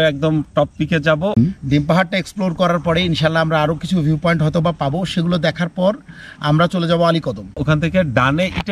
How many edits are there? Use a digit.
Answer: 2